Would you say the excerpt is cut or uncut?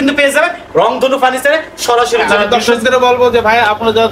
cut